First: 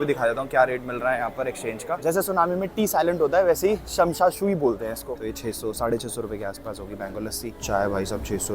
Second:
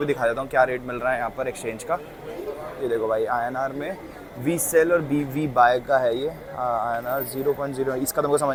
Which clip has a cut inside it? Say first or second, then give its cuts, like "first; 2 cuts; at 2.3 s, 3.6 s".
first; 3 cuts; at 2.0 s, 5.0 s, 7.6 s